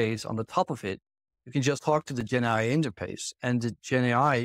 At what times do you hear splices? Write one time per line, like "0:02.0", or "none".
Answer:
0:01.8